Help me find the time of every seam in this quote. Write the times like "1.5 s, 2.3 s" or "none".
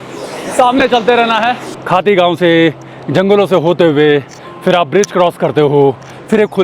1.7 s